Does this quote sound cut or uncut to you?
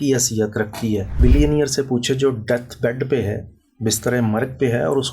cut